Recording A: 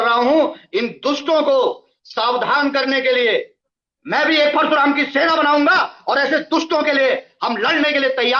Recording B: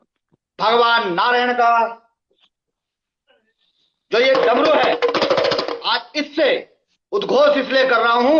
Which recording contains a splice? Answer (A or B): A